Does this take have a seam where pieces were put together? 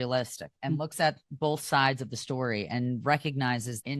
no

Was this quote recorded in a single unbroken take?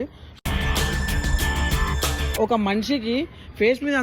no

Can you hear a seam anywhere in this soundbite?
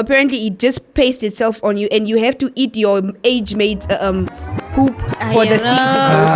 no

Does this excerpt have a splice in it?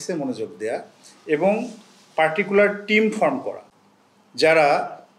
no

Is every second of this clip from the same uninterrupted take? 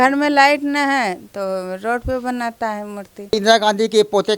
no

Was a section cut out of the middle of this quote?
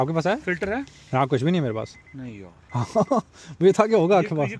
no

